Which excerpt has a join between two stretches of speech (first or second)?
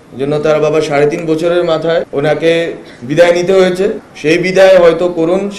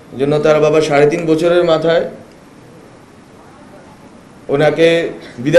first